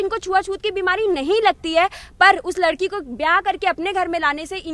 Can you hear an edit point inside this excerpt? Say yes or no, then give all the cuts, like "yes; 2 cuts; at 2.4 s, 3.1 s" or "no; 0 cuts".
no; 0 cuts